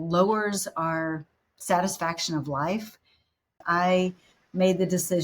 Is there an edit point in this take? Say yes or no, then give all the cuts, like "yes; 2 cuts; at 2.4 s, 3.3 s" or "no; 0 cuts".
yes; 1 cut; at 3.6 s